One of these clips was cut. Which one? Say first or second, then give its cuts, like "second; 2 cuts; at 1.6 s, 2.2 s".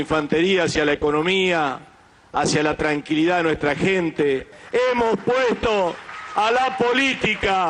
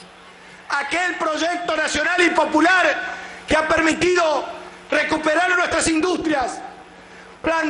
first; 1 cut; at 4.5 s